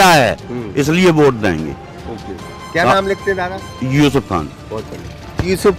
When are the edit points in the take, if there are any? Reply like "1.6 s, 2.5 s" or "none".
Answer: none